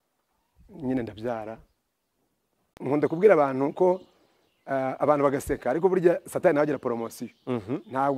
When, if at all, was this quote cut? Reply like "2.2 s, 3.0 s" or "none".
2.7 s